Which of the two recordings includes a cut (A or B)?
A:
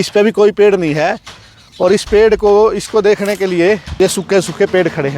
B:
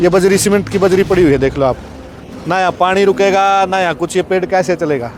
A